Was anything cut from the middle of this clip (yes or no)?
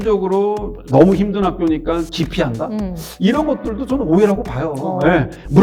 no